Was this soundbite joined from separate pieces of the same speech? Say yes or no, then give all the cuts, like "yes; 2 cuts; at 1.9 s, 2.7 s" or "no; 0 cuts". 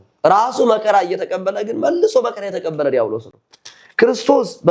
no; 0 cuts